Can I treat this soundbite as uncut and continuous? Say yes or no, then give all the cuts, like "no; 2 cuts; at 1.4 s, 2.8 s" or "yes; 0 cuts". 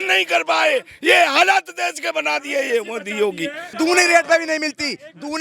no; 1 cut; at 3.8 s